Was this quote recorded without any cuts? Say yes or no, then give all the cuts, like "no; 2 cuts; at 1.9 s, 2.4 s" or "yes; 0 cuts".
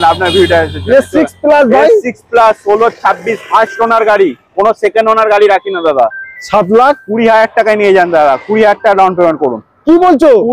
yes; 0 cuts